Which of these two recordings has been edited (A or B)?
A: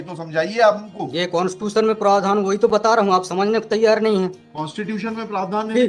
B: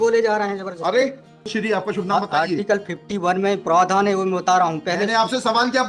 B